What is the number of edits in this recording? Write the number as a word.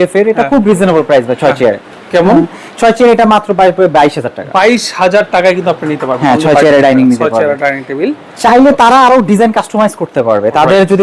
zero